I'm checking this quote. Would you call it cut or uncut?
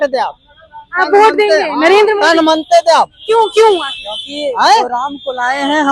uncut